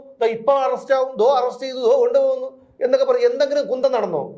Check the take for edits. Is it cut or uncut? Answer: uncut